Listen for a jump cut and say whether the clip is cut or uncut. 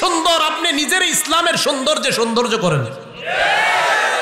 uncut